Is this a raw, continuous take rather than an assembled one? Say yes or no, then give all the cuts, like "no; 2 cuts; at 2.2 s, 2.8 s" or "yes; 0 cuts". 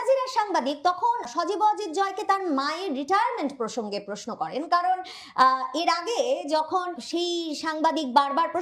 no; 2 cuts; at 1.3 s, 7.0 s